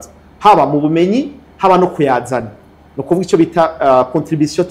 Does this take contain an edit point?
no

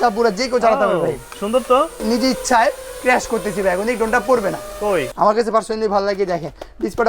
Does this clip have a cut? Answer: yes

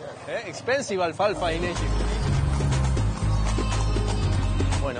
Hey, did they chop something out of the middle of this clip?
yes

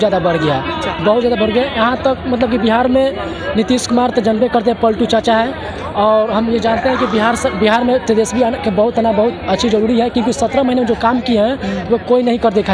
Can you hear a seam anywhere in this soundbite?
no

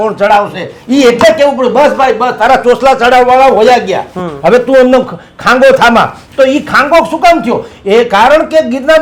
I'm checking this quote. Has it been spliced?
no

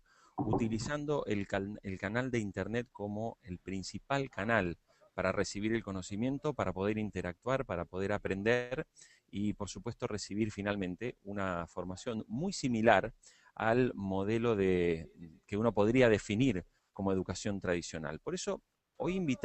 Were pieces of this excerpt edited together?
yes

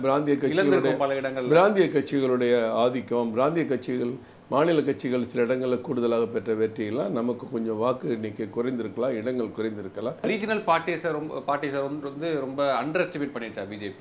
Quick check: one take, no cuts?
no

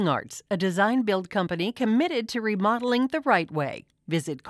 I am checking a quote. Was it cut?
no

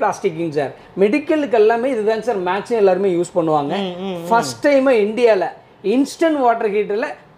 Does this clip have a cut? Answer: no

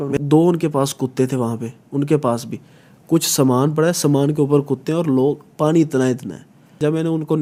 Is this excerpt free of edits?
yes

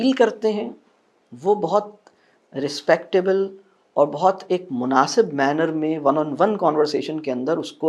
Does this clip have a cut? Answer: no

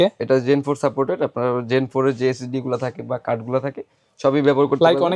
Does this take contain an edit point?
no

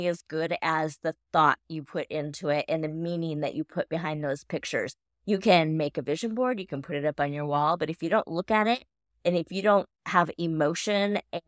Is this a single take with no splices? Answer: yes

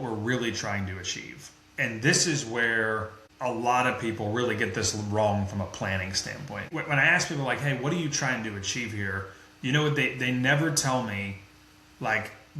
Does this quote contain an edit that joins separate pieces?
yes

